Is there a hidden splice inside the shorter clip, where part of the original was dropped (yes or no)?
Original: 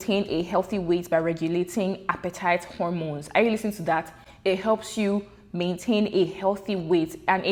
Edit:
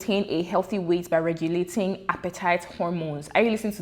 no